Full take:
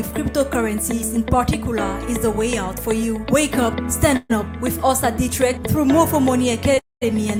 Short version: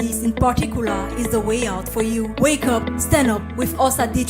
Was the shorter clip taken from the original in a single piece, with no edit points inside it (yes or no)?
no